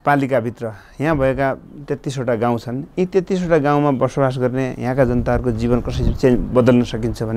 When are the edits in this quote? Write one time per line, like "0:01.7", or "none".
none